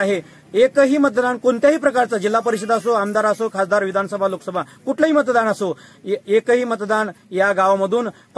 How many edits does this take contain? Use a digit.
0